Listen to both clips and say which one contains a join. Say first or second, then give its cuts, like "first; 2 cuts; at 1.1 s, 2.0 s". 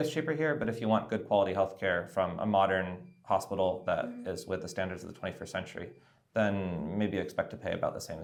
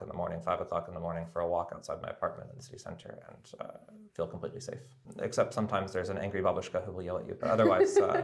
second; 1 cut; at 4.9 s